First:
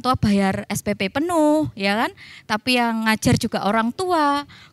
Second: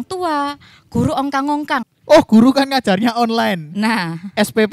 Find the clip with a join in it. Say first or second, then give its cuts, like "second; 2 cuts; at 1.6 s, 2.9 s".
second; 1 cut; at 1.9 s